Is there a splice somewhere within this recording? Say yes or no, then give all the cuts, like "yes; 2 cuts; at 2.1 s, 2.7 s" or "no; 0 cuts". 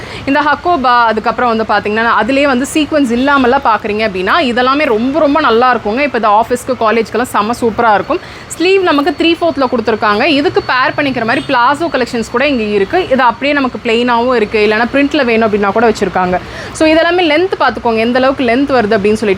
no; 0 cuts